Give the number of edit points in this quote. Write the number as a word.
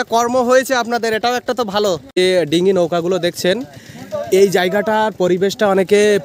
one